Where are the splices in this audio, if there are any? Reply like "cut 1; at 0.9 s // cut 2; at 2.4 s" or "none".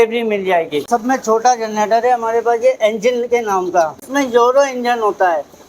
cut 1; at 0.8 s // cut 2; at 4.0 s